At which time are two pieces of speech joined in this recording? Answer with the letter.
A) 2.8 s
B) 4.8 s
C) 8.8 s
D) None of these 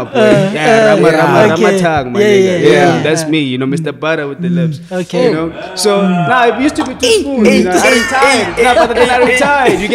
D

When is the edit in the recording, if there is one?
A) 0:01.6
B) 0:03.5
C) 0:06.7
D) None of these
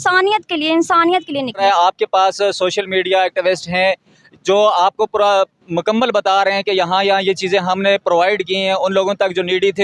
A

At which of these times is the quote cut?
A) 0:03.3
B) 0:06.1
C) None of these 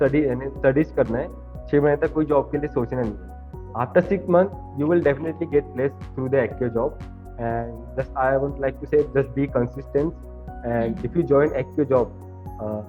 C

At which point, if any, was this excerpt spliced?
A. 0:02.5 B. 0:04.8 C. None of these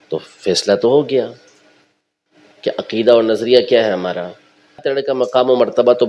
B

